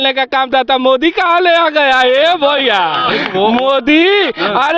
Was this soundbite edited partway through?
no; 0 cuts

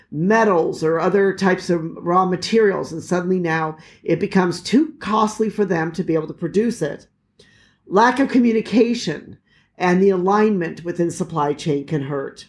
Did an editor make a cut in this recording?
no; 0 cuts

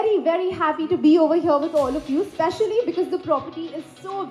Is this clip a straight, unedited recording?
yes; 0 cuts

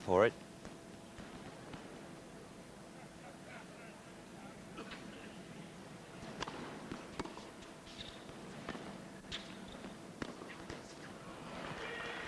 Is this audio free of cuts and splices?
yes; 0 cuts

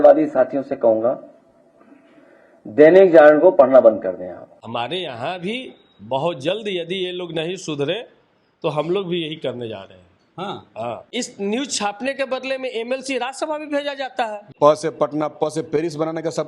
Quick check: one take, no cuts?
no; 3 cuts; at 4.5 s, 11.1 s, 14.4 s

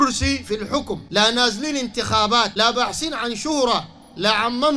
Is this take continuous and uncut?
no; 2 cuts; at 1.0 s, 2.5 s

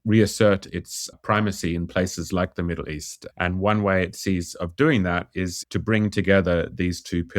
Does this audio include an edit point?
no; 0 cuts

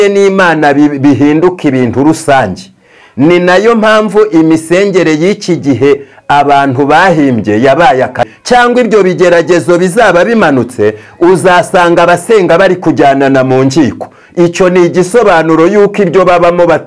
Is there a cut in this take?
yes; 1 cut; at 8.3 s

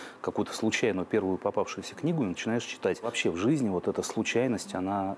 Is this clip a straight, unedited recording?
no; 1 cut; at 3.1 s

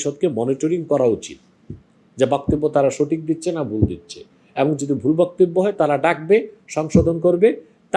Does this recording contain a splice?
no; 0 cuts

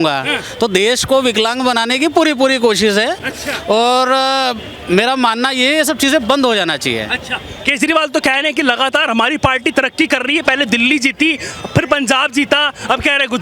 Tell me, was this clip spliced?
no; 0 cuts

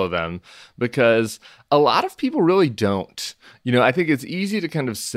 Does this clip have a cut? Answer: yes; 1 cut; at 1.6 s

